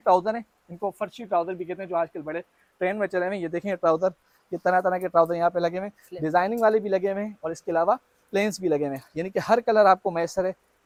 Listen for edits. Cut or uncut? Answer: uncut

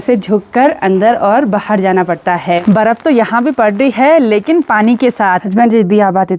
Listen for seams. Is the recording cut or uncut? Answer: cut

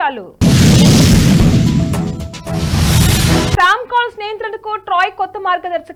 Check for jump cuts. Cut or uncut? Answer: uncut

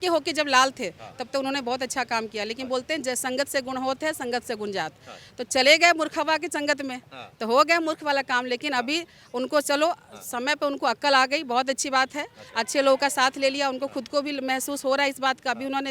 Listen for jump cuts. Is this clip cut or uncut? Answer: uncut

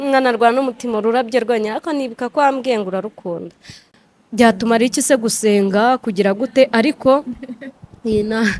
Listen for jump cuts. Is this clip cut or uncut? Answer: cut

